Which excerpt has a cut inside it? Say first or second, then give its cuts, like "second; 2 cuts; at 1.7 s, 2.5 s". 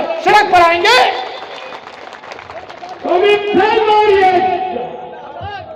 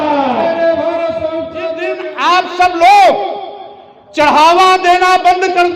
second; 1 cut; at 2.0 s